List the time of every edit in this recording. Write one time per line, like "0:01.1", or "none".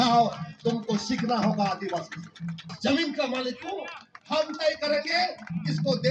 0:02.7